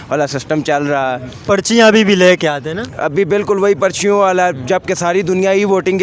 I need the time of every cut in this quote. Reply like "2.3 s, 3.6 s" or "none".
none